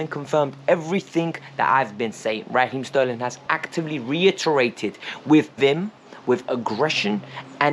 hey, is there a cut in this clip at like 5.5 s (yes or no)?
yes